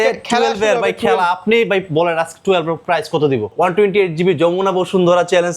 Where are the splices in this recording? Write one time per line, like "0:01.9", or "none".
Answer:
0:03.5